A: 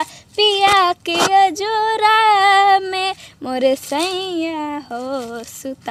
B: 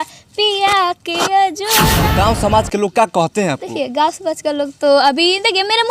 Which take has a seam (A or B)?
B